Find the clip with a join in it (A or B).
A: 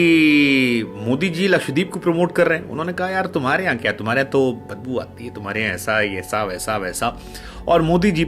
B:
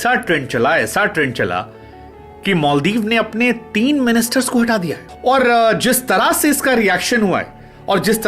B